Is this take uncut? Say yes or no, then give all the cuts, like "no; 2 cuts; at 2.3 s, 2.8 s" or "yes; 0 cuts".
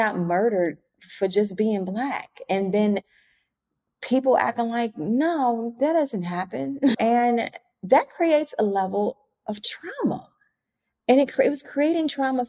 yes; 0 cuts